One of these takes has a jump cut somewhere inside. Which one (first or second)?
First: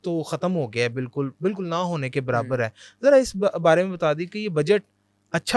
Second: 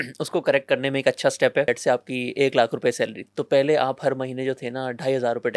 second